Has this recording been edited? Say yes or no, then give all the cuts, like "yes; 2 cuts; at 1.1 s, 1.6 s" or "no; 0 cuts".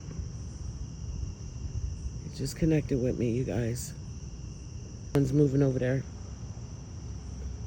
yes; 1 cut; at 5.2 s